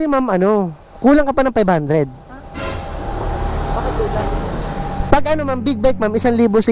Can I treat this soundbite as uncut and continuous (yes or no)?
yes